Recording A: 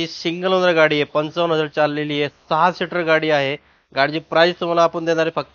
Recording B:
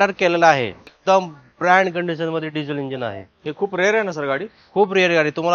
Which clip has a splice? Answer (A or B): B